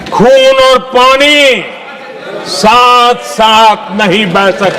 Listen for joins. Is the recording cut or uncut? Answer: uncut